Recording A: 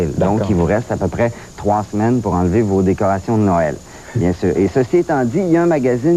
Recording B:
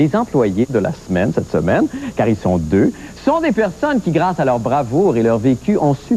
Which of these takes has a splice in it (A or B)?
B